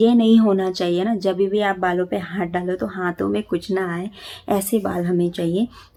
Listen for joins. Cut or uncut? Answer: uncut